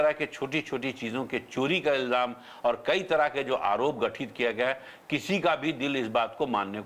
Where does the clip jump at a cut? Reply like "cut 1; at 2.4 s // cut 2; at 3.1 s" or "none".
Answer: none